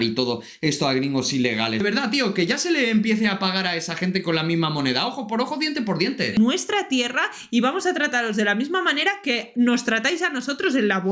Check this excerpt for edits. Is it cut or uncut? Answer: cut